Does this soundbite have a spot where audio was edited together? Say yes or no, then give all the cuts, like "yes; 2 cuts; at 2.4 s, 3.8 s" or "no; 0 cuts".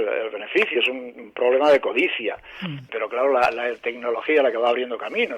yes; 1 cut; at 2.8 s